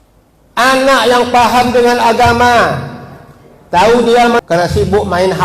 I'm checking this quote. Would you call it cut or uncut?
cut